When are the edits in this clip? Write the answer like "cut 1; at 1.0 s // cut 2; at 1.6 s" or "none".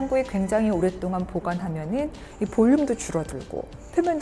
none